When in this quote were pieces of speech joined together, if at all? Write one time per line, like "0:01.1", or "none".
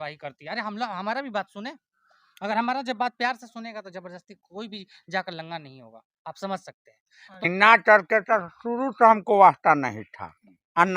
0:07.5